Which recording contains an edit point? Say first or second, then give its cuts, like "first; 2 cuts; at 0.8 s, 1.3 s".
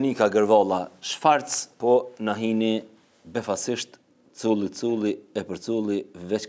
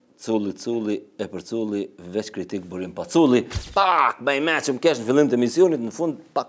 second; 1 cut; at 3.6 s